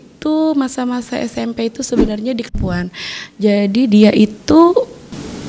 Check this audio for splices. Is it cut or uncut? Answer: cut